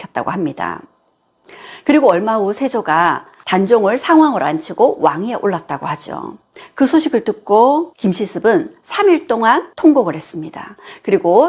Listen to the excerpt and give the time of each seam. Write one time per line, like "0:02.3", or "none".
0:07.9